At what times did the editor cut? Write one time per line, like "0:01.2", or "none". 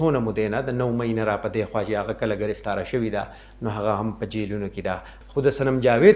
0:05.1

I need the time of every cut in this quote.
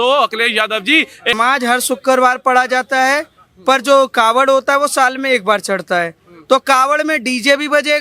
0:01.4

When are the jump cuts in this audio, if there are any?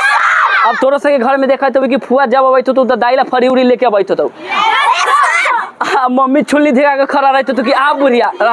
none

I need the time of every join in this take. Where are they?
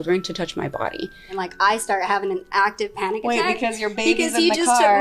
0:01.3

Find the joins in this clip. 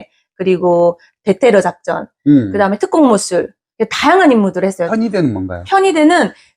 0:04.8

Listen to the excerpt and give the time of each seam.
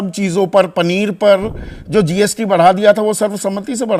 none

